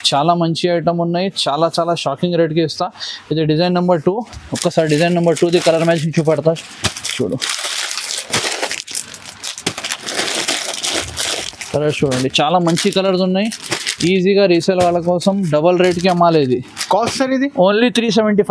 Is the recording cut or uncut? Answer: uncut